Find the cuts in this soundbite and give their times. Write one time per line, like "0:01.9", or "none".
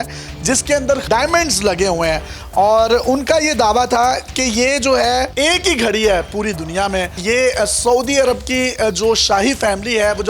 0:01.0
0:05.3

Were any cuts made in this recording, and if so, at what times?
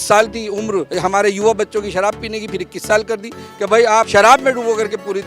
0:00.9
0:04.1

